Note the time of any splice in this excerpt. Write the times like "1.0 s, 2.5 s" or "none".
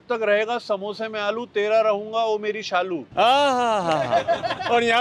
none

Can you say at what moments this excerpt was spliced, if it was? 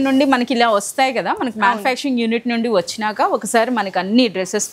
none

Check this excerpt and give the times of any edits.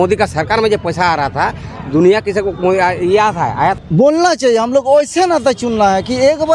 3.8 s

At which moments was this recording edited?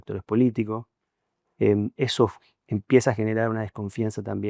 none

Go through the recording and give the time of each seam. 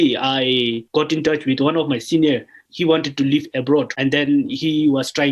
0.8 s, 2.6 s, 3.9 s

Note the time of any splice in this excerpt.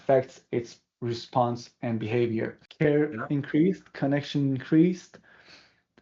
2.6 s

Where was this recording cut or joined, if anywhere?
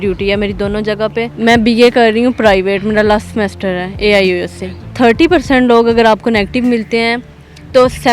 1.3 s, 4.9 s

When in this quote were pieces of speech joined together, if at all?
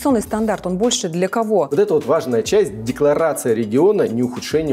1.7 s

